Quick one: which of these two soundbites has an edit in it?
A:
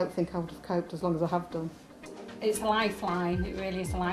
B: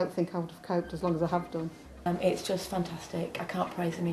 B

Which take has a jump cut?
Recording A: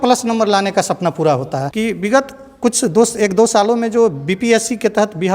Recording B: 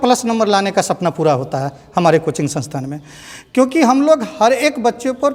A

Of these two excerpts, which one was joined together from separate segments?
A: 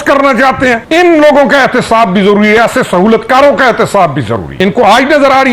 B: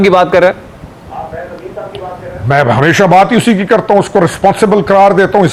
A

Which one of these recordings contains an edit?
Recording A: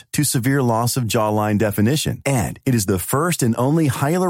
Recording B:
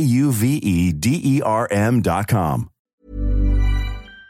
B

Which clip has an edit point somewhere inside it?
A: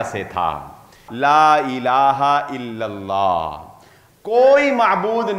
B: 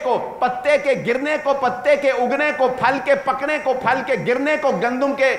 A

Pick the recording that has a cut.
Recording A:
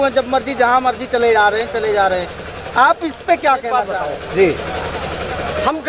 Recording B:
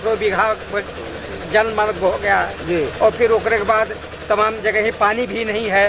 A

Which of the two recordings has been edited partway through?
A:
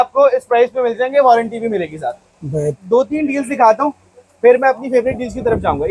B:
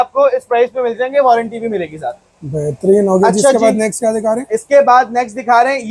A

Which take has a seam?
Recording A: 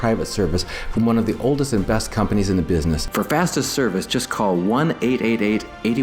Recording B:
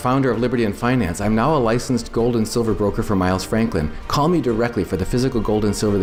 A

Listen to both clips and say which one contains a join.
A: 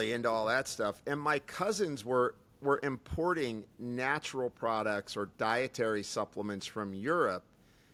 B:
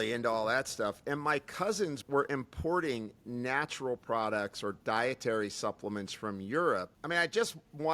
B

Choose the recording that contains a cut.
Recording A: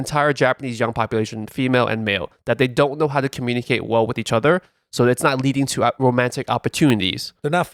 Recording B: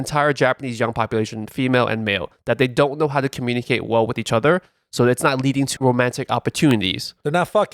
B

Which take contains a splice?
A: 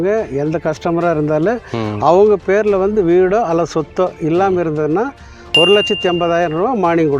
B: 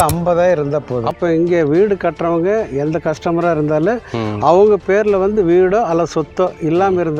B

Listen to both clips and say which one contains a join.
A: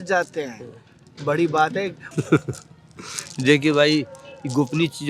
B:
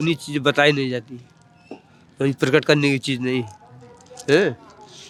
A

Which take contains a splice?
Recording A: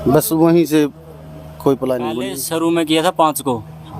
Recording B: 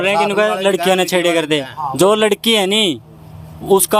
A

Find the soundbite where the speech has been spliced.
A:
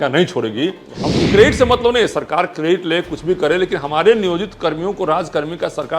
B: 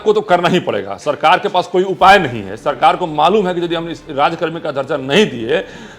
A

